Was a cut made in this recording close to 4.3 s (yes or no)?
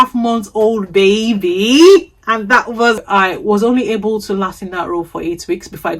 no